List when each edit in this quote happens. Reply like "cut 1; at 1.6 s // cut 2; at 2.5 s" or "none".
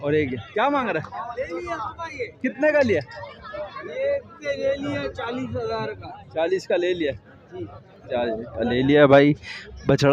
none